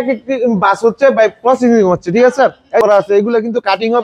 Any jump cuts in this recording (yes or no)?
yes